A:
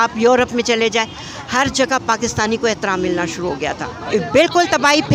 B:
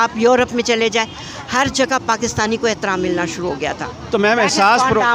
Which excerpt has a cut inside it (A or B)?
A